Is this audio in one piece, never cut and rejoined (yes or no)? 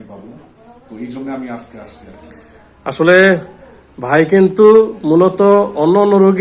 yes